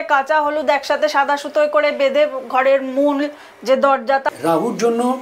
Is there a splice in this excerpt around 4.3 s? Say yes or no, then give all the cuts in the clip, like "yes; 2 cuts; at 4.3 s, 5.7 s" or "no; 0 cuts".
yes; 1 cut; at 4.3 s